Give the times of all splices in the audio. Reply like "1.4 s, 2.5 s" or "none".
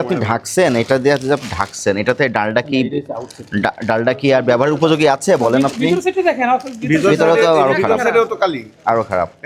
none